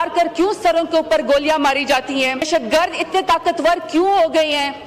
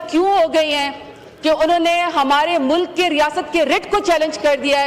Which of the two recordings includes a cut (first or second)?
first